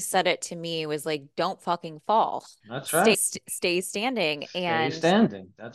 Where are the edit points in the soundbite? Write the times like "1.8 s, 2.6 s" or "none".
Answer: 2.6 s